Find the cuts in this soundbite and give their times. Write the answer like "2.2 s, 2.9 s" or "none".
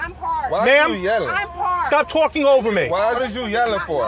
3.2 s